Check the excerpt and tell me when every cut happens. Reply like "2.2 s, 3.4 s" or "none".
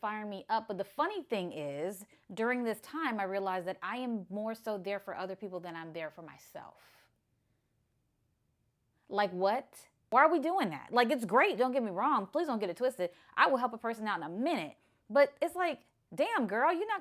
none